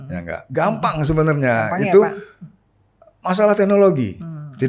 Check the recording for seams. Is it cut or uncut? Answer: uncut